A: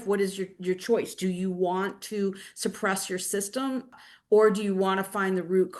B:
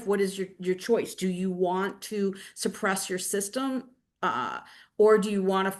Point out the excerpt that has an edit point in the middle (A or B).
A